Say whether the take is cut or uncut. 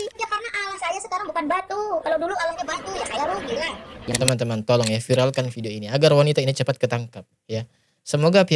cut